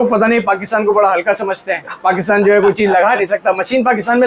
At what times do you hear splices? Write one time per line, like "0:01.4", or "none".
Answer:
none